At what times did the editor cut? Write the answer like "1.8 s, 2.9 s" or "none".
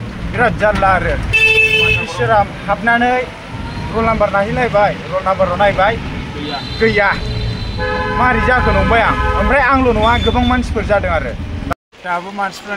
11.7 s

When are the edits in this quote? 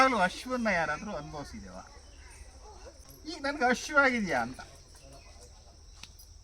3.1 s

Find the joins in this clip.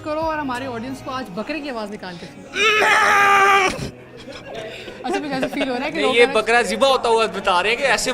none

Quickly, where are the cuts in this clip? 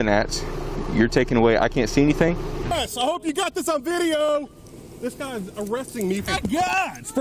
2.7 s, 6.3 s

